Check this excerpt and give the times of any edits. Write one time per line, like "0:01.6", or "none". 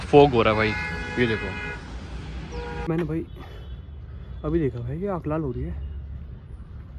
0:02.9